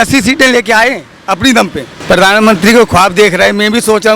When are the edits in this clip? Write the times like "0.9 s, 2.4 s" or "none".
1.9 s